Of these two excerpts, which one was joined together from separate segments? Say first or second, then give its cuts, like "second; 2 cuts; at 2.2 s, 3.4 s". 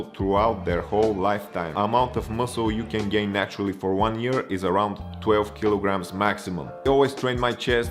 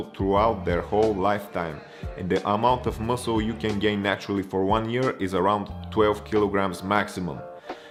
first; 2 cuts; at 1.7 s, 6.9 s